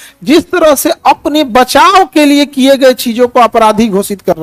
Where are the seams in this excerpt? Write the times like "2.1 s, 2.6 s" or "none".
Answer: none